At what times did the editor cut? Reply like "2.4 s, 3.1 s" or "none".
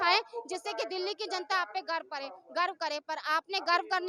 none

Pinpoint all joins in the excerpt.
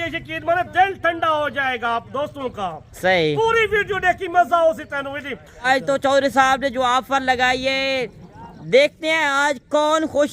5.7 s

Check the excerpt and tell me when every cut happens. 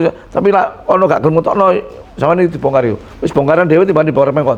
none

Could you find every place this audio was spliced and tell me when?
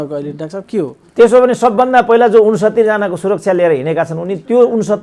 none

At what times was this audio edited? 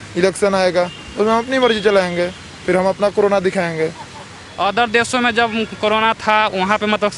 4.4 s

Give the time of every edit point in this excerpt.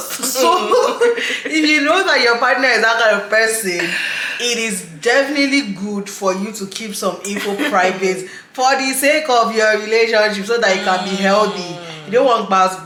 none

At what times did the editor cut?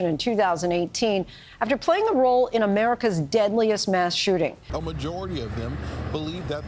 4.6 s

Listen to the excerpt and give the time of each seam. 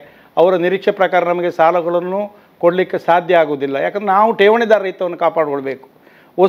none

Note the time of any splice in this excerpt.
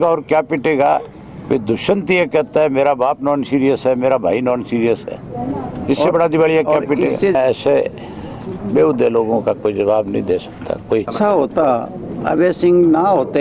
7.4 s, 11.1 s

